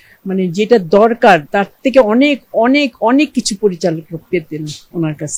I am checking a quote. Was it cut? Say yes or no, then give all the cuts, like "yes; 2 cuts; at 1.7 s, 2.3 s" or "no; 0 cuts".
yes; 1 cut; at 1.5 s